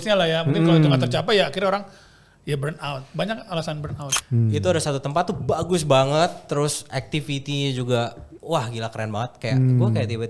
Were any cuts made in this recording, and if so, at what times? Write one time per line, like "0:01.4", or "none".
0:04.1